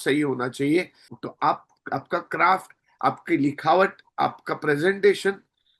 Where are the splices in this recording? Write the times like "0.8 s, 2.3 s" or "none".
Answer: 1.0 s